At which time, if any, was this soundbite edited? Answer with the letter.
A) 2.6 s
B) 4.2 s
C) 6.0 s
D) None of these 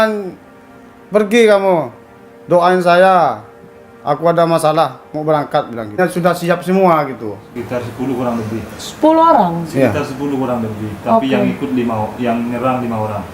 C